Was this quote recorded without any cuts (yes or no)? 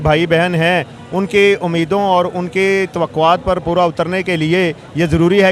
yes